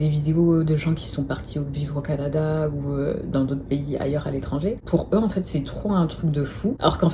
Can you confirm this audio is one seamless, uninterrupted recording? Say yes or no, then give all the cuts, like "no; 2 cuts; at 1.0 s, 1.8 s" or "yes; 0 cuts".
yes; 0 cuts